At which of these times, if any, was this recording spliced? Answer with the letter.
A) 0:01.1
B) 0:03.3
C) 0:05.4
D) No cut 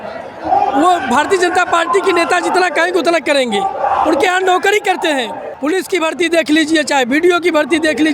C